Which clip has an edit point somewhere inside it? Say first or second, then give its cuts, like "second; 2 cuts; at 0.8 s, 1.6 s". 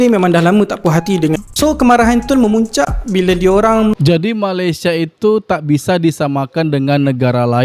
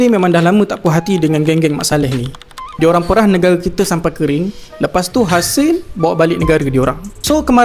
first; 2 cuts; at 1.4 s, 4.0 s